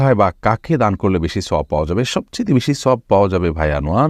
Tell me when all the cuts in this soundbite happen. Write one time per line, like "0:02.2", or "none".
none